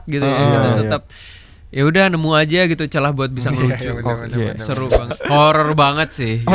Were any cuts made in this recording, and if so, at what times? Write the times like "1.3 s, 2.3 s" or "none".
5.1 s